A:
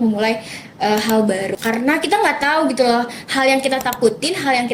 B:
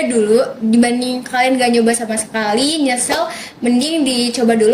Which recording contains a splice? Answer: A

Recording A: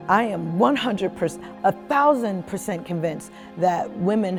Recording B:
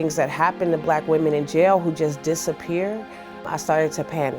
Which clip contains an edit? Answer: B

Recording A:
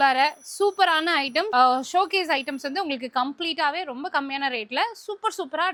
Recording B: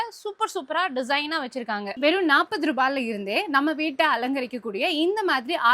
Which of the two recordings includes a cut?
B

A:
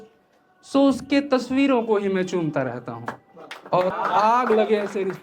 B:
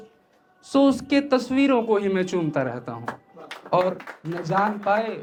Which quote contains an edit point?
A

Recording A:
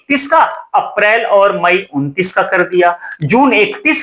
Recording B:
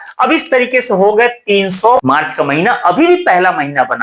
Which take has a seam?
B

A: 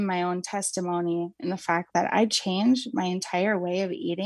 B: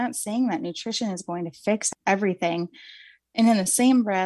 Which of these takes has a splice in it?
B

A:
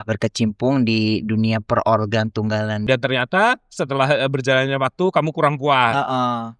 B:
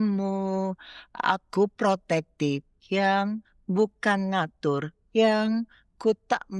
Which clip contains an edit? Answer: A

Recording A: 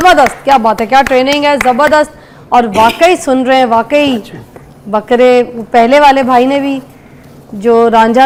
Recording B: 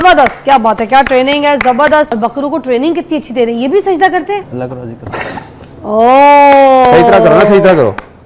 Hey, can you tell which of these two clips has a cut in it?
B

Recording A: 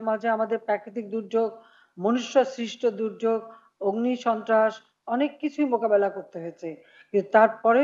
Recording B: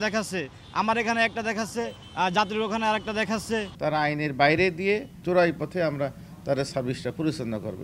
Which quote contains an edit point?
B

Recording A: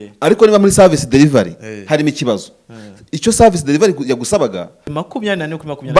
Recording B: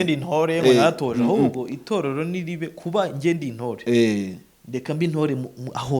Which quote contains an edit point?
A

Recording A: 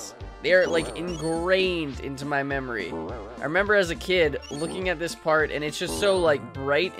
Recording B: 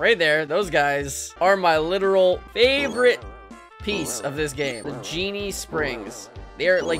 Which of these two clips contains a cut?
B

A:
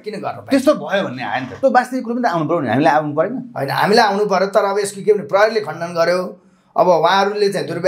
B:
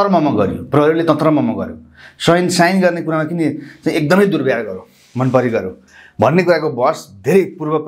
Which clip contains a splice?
A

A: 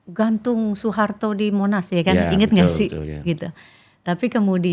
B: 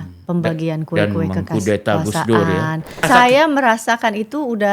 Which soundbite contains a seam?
B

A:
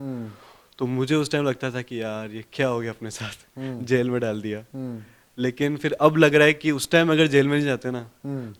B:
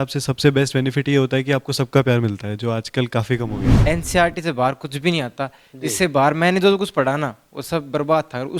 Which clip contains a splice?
B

